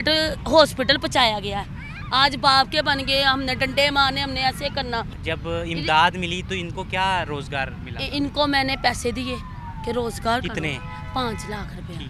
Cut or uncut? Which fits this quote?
uncut